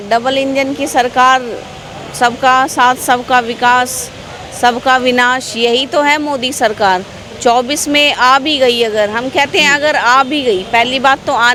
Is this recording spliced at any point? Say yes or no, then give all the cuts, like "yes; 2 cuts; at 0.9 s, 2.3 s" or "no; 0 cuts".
no; 0 cuts